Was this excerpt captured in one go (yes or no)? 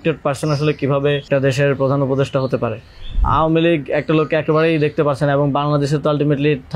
no